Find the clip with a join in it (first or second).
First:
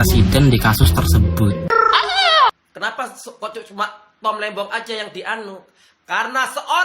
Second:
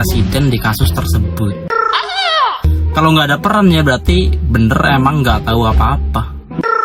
first